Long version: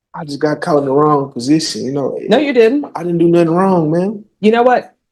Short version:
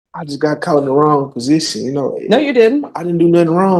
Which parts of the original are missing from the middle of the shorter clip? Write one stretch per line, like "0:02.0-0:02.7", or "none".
none